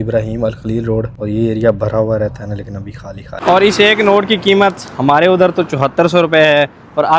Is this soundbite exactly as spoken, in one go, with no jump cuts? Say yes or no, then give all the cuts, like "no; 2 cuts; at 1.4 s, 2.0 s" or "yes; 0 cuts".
no; 2 cuts; at 1.1 s, 3.3 s